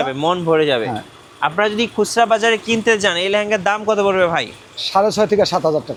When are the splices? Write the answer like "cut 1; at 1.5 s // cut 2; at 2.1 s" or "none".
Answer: none